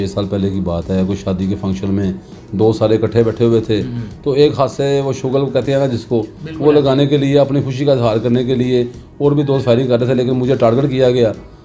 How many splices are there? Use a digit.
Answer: 0